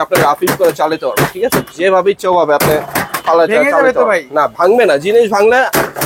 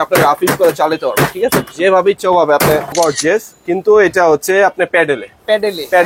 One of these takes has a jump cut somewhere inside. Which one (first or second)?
second